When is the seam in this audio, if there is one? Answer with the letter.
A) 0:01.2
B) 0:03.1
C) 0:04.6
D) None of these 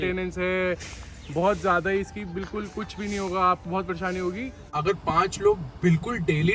C